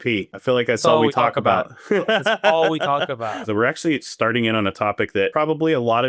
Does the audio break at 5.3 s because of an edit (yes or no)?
yes